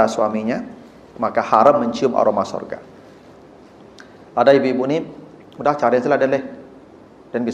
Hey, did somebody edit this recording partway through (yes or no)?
no